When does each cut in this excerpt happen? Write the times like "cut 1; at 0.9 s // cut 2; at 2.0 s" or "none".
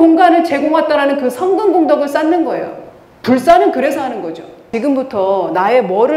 cut 1; at 4.7 s